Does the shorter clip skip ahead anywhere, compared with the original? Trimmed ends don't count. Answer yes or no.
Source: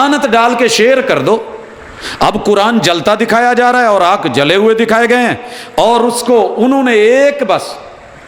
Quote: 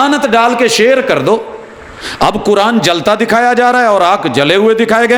no